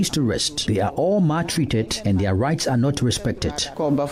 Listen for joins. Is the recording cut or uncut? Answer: uncut